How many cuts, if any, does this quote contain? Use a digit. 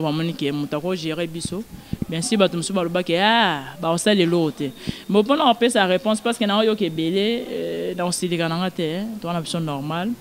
0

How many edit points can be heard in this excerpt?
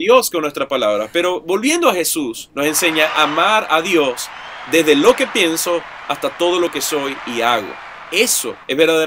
0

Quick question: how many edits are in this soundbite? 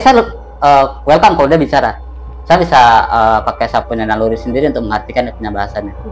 0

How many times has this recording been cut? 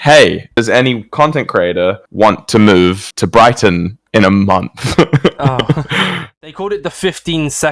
1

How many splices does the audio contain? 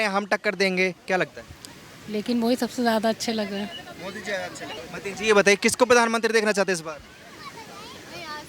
1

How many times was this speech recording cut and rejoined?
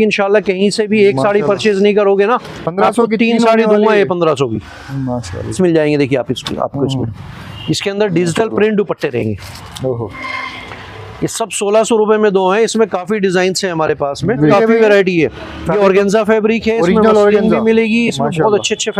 2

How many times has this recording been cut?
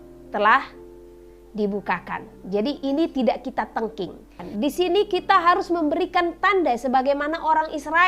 1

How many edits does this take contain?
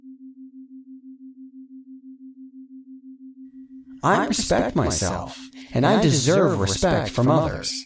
0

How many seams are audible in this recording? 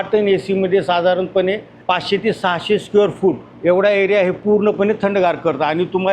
2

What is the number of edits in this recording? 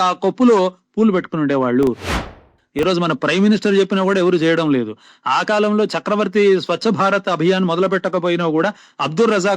1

